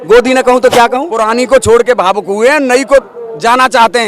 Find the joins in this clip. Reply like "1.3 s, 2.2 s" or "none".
1.1 s